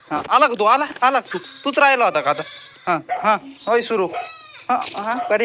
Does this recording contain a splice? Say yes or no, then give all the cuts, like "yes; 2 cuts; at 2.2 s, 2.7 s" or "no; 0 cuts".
no; 0 cuts